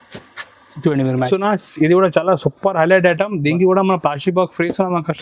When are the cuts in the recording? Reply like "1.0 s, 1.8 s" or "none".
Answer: 1.3 s